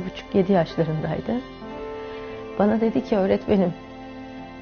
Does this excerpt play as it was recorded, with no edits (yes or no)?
yes